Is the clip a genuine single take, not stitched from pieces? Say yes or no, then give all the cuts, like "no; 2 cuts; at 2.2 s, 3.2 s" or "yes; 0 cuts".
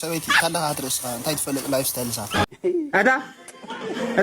no; 1 cut; at 2.4 s